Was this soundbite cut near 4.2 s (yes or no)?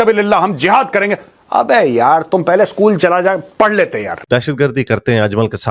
yes